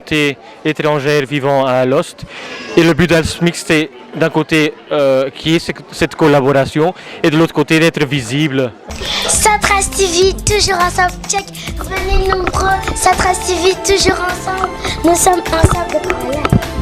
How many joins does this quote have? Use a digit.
1